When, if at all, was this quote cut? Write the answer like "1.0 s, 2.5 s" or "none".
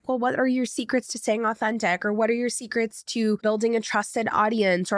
3.4 s

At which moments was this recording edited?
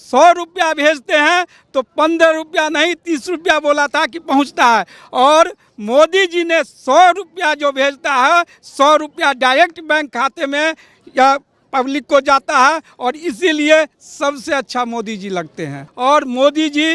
15.9 s

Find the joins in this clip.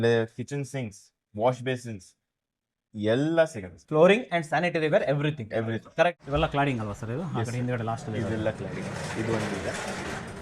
6.1 s

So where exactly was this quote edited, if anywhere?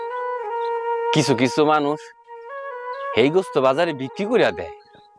none

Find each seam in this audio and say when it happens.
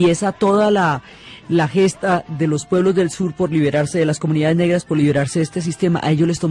2.3 s

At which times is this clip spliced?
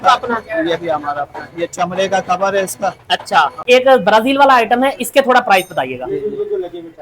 3.6 s

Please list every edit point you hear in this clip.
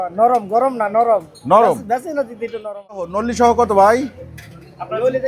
3.2 s

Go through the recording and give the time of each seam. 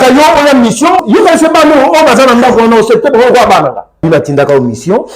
1.0 s, 4.0 s

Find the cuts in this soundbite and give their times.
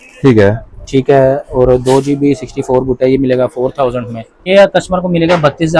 4.5 s

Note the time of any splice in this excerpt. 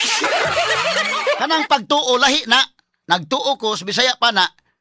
1.2 s

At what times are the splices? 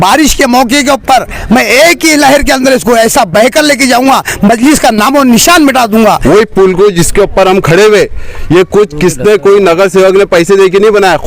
6.2 s

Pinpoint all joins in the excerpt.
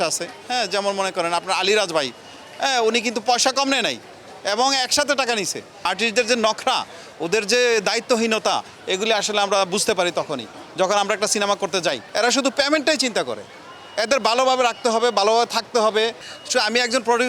5.8 s, 12.0 s, 16.3 s

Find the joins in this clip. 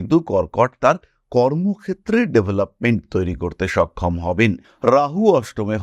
4.7 s

